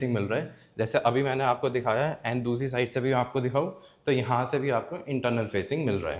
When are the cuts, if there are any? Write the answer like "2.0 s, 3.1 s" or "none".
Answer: none